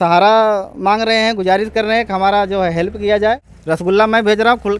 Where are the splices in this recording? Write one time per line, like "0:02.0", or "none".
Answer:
0:03.5

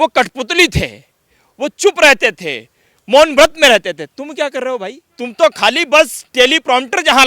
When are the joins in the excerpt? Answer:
0:05.0

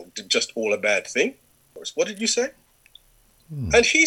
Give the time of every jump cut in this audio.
0:01.8

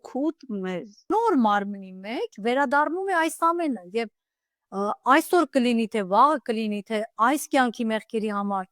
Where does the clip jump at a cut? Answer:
0:01.1

